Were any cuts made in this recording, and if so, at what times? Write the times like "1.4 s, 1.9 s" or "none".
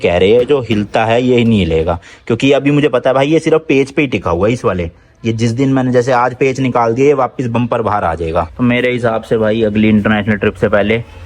8.5 s